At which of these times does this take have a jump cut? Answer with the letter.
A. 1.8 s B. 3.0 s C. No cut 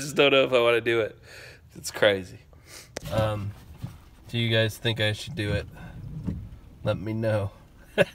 B